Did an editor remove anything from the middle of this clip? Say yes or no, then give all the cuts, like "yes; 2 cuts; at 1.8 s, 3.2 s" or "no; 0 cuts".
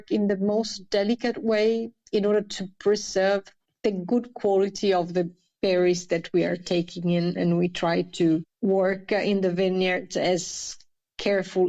no; 0 cuts